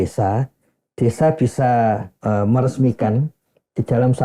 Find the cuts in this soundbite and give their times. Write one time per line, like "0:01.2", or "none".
0:02.1